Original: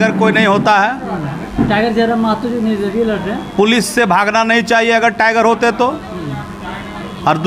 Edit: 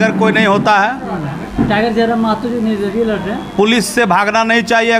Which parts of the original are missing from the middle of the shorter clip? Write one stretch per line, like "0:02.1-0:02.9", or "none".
none